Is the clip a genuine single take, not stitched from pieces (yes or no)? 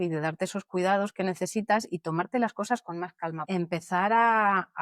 no